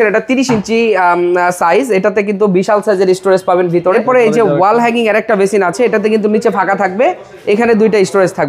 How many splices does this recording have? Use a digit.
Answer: 1